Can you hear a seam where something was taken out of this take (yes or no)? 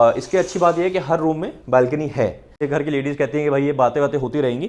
yes